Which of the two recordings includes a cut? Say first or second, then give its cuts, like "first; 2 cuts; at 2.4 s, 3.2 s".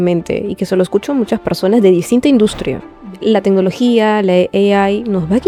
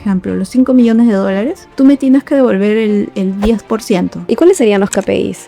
second; 2 cuts; at 1.6 s, 4.2 s